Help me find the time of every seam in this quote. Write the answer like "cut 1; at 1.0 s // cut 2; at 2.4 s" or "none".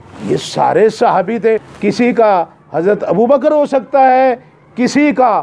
cut 1; at 1.6 s